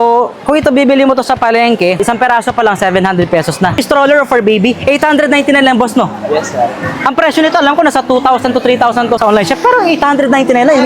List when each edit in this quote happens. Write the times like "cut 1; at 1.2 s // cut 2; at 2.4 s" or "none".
cut 1; at 2.0 s // cut 2; at 3.8 s // cut 3; at 9.2 s